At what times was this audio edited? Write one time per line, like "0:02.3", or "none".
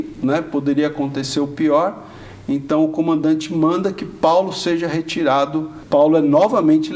0:05.8